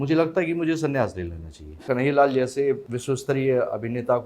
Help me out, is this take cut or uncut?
cut